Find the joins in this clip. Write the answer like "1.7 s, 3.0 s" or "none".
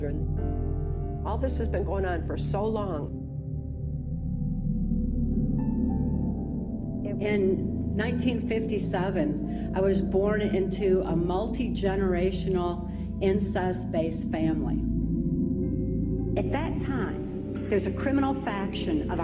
none